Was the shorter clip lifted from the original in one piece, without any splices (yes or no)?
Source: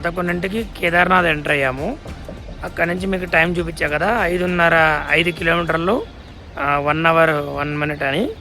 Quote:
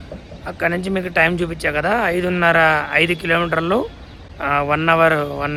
yes